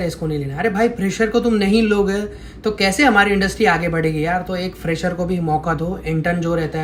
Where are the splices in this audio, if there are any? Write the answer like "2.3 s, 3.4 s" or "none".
none

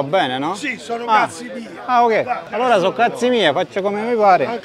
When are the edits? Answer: 2.4 s

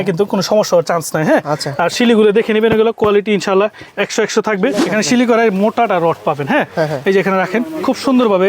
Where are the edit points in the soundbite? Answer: 4.8 s

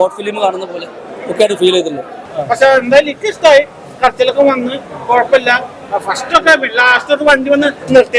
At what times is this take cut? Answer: 2.3 s

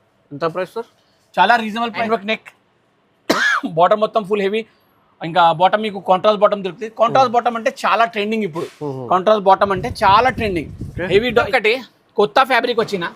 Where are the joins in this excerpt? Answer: 2.1 s, 11.5 s

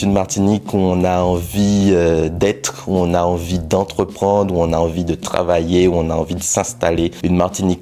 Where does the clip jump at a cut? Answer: none

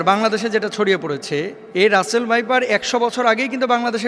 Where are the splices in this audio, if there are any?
1.6 s

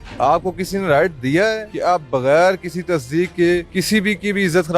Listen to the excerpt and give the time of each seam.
1.7 s, 3.7 s

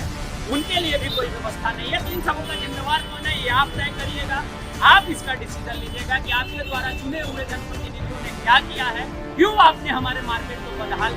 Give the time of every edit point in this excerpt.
none

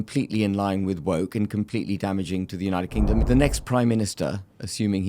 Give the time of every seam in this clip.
3.2 s

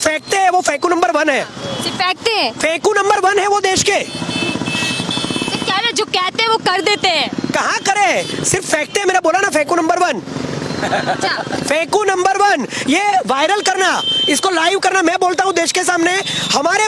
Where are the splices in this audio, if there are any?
none

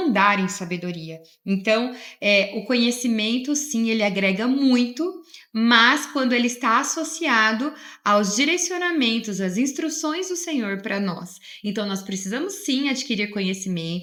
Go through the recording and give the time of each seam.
none

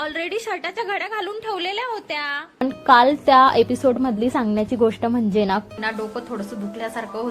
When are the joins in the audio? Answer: 2.6 s, 5.8 s

